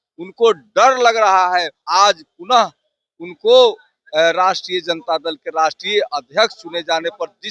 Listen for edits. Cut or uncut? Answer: cut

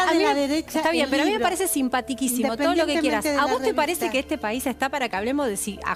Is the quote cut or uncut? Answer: uncut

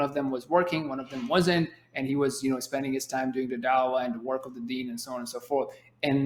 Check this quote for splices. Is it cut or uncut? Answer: uncut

